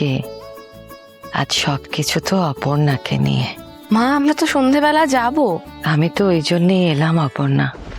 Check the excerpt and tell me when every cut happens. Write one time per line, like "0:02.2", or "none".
0:01.2
0:03.6